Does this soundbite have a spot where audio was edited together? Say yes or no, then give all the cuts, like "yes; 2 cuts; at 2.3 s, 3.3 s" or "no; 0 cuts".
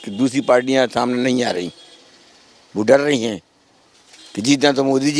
no; 0 cuts